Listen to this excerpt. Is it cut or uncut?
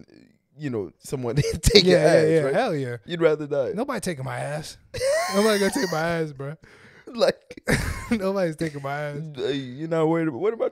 uncut